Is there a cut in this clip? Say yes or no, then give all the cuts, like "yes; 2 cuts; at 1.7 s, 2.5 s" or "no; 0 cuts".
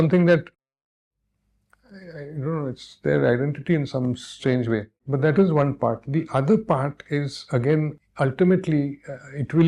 yes; 2 cuts; at 5.0 s, 7.9 s